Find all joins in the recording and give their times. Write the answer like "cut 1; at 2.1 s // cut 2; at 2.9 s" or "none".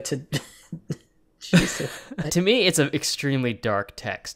cut 1; at 2.3 s